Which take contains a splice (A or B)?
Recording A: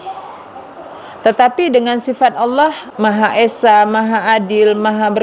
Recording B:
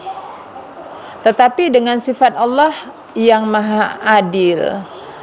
A